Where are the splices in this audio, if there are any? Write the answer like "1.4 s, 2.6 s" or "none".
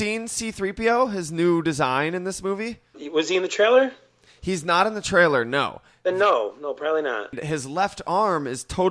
3.0 s, 7.4 s